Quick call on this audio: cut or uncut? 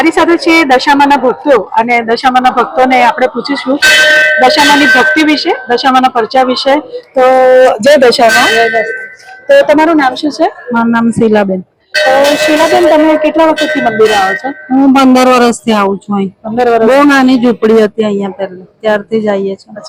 uncut